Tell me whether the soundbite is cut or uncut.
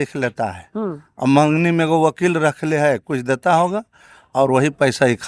uncut